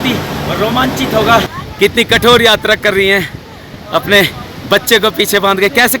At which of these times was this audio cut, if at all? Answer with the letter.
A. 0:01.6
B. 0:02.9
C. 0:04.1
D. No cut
A